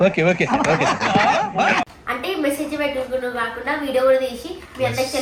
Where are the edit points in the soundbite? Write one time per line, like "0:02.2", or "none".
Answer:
none

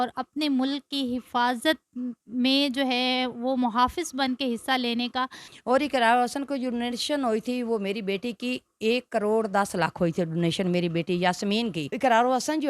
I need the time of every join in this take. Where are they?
0:05.4
0:11.9

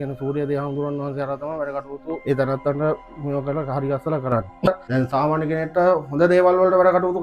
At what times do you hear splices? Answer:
0:02.2
0:04.7

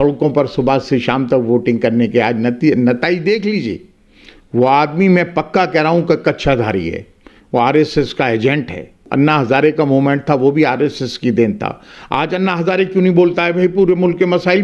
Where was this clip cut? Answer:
0:09.1

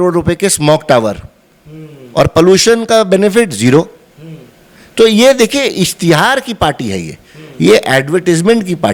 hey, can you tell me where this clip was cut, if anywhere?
none

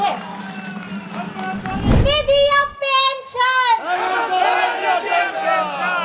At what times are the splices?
0:02.0

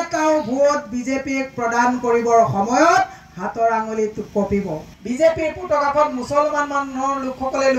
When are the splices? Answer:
0:04.9

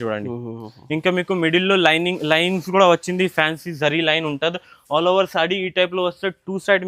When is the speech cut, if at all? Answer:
none

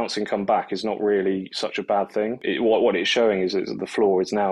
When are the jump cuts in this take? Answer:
0:02.4

